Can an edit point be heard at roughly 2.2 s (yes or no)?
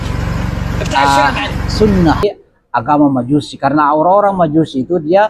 yes